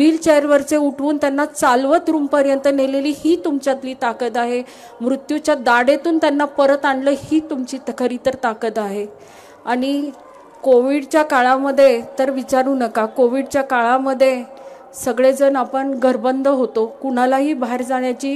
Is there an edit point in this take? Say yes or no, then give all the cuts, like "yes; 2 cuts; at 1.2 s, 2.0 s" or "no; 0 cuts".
no; 0 cuts